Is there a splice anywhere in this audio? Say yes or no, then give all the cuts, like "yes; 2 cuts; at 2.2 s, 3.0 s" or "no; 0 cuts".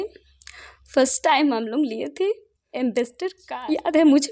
yes; 1 cut; at 3.4 s